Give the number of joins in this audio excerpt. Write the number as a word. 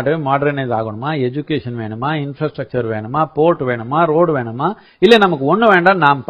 zero